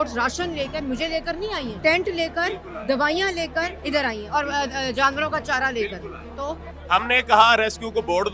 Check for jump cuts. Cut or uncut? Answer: cut